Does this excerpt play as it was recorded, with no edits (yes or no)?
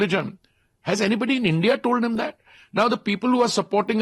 yes